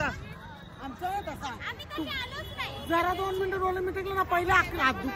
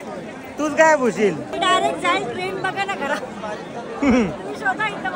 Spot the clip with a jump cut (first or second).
second